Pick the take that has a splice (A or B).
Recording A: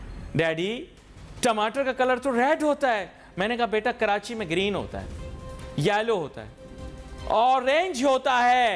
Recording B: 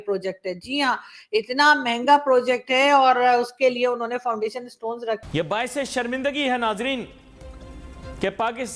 B